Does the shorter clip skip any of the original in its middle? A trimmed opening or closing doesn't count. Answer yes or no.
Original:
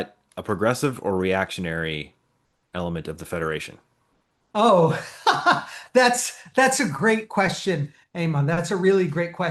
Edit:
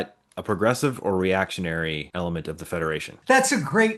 yes